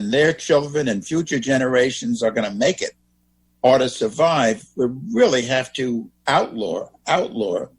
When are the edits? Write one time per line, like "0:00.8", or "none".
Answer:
0:06.1